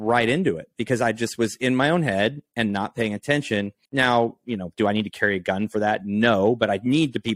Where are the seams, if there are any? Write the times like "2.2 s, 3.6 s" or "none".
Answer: 3.8 s